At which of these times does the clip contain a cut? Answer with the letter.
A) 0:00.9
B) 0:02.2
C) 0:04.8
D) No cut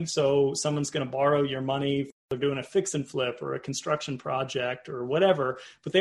B